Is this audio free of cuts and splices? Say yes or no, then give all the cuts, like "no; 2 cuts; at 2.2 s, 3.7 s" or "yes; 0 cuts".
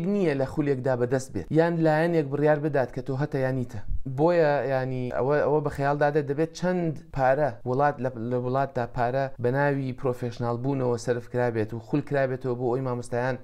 yes; 0 cuts